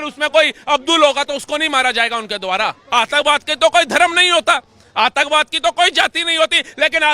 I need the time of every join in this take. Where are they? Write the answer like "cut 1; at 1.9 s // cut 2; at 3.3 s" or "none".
cut 1; at 2.8 s